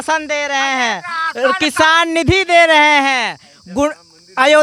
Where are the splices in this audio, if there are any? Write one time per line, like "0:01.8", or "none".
none